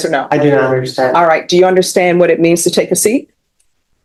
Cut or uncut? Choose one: uncut